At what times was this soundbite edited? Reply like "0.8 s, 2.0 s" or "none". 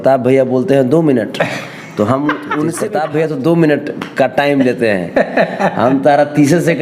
2.8 s